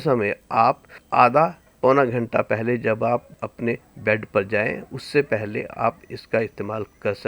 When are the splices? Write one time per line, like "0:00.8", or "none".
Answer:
0:00.9
0:01.7
0:03.4